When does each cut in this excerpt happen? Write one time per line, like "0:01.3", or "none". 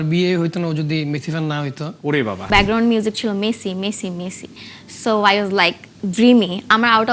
0:02.5